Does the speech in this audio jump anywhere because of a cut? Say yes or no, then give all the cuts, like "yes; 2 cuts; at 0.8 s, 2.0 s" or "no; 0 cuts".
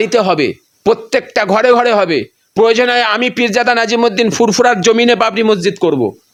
no; 0 cuts